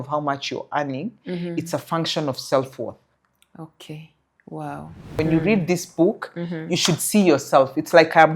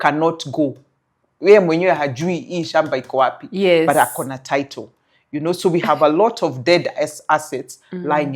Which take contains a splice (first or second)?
first